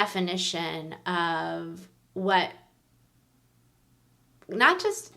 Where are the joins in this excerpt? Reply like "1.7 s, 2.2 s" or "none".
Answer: none